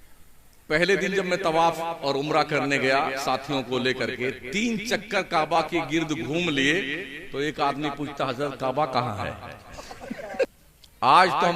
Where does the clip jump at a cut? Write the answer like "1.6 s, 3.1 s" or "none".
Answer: 10.5 s